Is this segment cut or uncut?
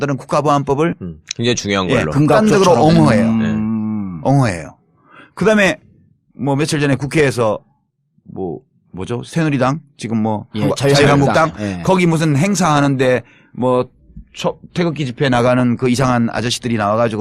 cut